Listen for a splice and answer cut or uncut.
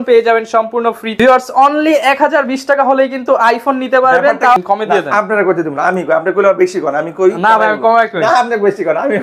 cut